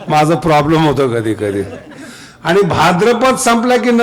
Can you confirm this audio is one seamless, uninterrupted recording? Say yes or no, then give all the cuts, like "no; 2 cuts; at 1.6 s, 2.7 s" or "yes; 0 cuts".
yes; 0 cuts